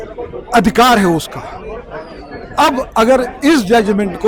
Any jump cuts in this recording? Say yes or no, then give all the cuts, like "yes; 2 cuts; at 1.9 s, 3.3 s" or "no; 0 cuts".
no; 0 cuts